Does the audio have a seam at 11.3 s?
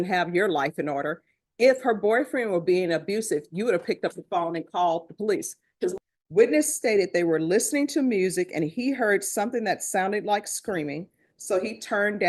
no; 1 cut; at 5.9 s

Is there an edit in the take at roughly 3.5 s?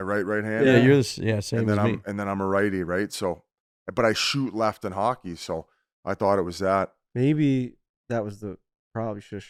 no; 0 cuts

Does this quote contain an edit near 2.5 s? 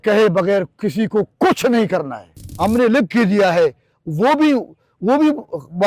yes; 1 cut; at 2.5 s

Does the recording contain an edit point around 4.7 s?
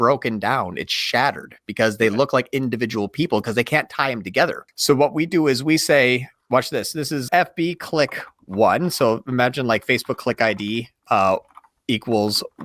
yes; 2 cuts; at 4.7 s, 7.2 s

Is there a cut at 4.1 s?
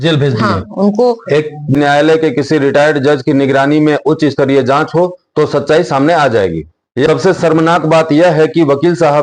no; 2 cuts; at 1.7 s, 7.1 s

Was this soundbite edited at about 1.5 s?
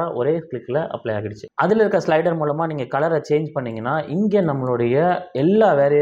yes; 1 cut; at 1.5 s

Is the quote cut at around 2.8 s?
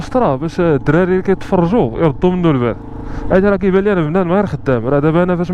no; 0 cuts

